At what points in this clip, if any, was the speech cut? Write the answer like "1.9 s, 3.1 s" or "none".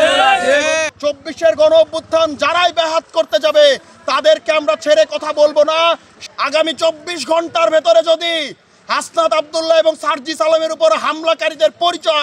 0.9 s, 6.1 s